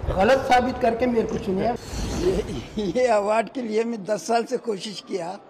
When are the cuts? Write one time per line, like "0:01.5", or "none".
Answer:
0:01.8

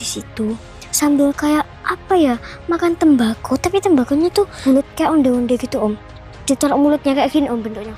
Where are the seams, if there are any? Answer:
0:04.5

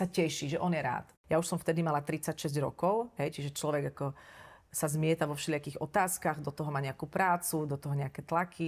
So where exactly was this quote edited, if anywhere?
0:01.1

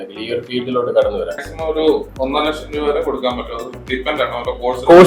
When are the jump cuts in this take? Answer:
0:01.4

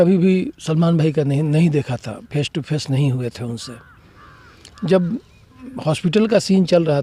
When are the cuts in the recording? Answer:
none

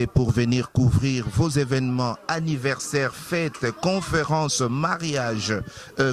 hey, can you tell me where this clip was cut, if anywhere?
none

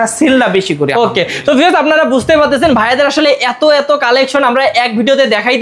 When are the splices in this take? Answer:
none

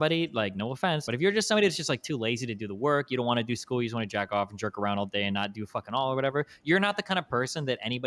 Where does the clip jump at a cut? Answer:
0:01.0

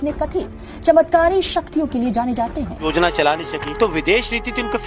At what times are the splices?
0:02.8

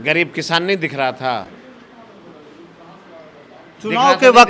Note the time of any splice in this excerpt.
none

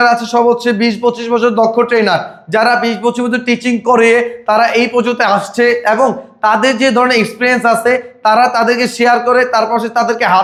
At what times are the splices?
none

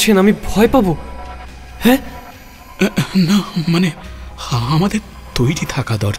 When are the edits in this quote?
0:01.5
0:02.6
0:04.1
0:05.2

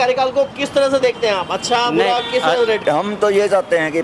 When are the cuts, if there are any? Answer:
0:02.8

